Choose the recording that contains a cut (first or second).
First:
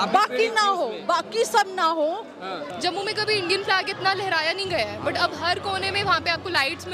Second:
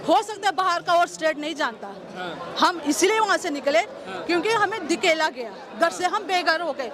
first